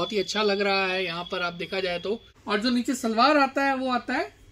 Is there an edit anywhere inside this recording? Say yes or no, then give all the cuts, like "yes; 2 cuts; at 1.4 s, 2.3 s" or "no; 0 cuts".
yes; 1 cut; at 2.3 s